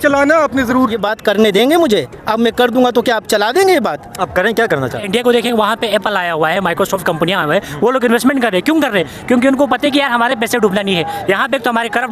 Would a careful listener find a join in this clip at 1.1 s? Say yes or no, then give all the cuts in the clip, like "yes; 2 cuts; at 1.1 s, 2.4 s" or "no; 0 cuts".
yes; 2 cuts; at 1.1 s, 5.0 s